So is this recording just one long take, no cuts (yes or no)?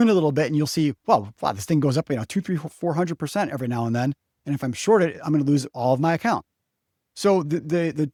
yes